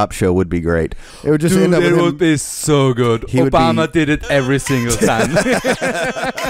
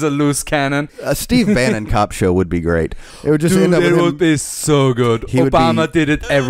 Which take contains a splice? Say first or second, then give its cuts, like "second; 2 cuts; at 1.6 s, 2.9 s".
second; 1 cut; at 0.9 s